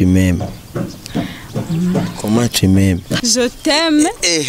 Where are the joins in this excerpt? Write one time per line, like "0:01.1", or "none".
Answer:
0:03.2